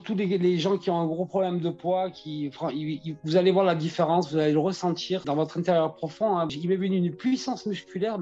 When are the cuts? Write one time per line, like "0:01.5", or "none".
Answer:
0:05.2
0:06.5

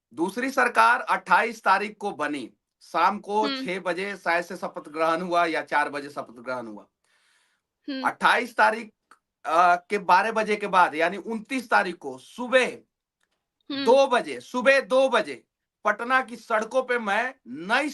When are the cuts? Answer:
none

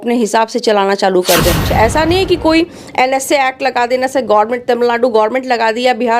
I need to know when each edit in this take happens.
0:01.6

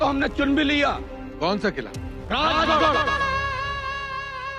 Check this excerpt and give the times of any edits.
0:03.0

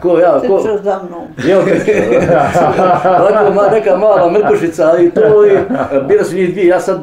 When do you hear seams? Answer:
0:05.9

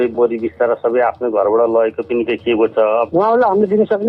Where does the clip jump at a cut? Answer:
0:03.1

